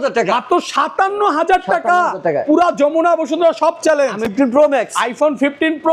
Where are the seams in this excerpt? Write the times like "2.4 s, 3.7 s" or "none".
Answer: 4.3 s